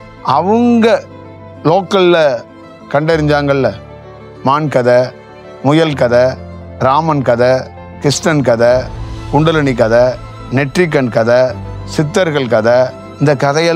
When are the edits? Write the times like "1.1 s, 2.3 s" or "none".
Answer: none